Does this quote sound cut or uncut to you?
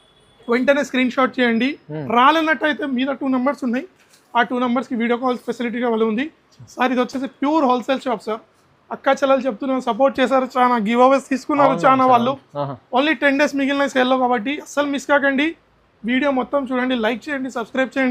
uncut